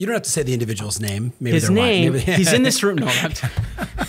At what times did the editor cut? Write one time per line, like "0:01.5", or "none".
none